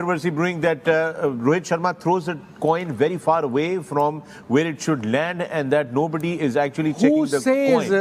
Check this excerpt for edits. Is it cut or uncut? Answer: uncut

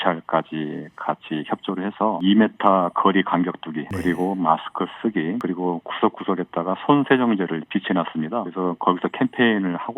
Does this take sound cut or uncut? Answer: cut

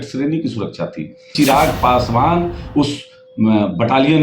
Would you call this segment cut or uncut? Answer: cut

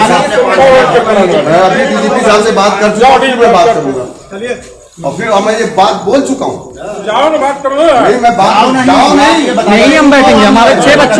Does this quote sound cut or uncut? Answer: uncut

